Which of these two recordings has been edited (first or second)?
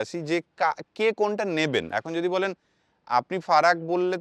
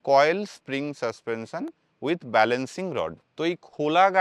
second